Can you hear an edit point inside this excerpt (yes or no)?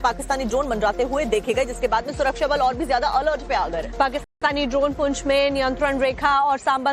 no